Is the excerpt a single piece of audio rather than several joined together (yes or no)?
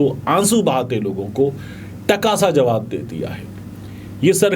yes